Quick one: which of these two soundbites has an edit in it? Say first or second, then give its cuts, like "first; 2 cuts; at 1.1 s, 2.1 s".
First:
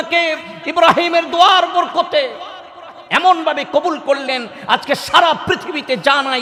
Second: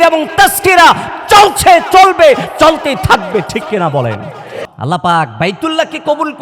second; 1 cut; at 4.5 s